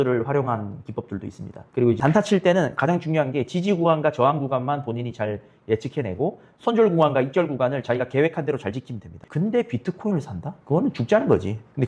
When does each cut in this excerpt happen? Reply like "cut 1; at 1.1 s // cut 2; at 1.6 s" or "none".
cut 1; at 9.1 s